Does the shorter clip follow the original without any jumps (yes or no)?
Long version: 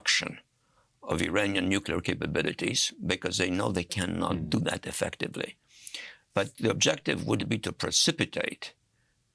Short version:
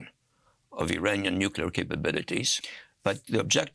no